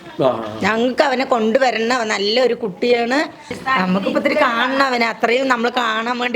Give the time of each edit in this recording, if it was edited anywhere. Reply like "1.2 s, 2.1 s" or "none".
3.5 s